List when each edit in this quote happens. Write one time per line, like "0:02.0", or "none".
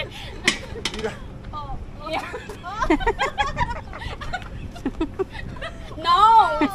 none